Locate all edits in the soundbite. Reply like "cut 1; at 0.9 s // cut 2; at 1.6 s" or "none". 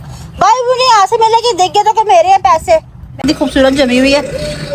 cut 1; at 3.2 s